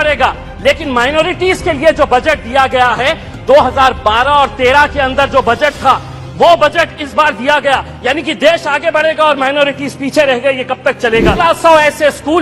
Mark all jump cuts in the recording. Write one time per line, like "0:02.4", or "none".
0:11.4